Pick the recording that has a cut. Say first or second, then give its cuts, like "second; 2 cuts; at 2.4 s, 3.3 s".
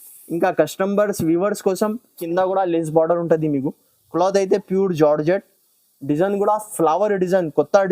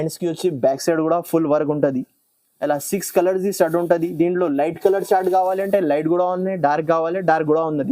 first; 1 cut; at 2.2 s